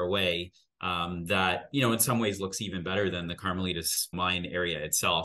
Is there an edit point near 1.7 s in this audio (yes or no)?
no